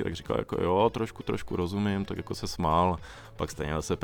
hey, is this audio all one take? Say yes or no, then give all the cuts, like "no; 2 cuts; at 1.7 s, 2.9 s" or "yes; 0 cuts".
yes; 0 cuts